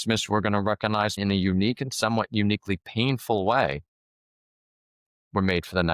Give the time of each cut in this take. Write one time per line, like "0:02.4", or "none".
0:01.2